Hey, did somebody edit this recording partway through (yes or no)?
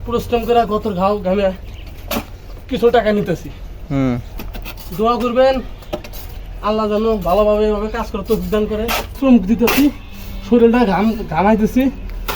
yes